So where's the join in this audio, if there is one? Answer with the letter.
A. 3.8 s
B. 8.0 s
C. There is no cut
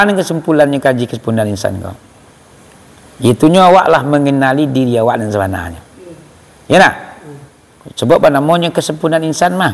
C